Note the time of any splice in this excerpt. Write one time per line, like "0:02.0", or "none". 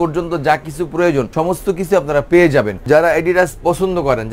0:01.3
0:02.8